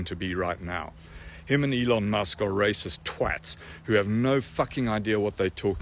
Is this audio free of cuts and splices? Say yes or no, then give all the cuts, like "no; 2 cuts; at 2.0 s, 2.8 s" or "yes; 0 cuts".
yes; 0 cuts